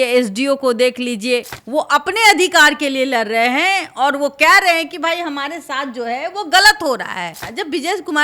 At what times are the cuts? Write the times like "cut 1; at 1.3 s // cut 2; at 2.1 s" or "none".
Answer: cut 1; at 1.6 s // cut 2; at 7.3 s